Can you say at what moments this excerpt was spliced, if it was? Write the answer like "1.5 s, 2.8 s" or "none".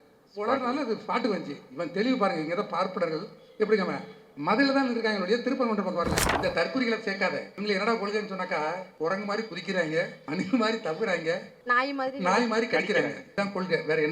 6.2 s, 7.5 s, 8.9 s, 10.2 s, 11.5 s, 13.2 s